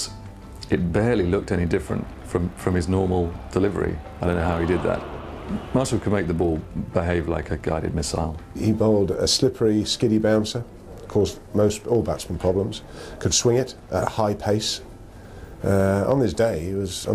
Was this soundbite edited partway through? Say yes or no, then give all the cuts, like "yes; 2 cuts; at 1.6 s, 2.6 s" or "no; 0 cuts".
no; 0 cuts